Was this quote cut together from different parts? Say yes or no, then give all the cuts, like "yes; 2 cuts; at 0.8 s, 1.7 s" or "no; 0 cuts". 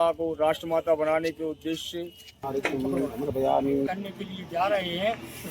yes; 2 cuts; at 2.5 s, 3.9 s